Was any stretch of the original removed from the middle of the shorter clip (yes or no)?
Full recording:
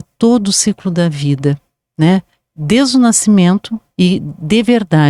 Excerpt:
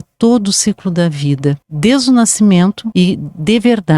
yes